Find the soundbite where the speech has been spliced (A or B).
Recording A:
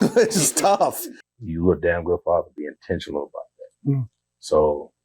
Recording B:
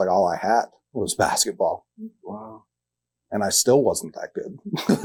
A